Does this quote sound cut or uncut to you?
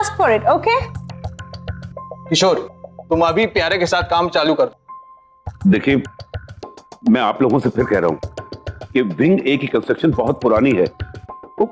uncut